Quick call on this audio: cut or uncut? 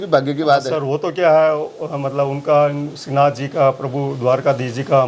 uncut